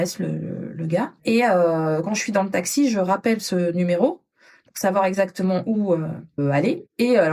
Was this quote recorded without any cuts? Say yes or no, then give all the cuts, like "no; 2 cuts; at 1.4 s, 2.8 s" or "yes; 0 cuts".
no; 2 cuts; at 1.2 s, 6.4 s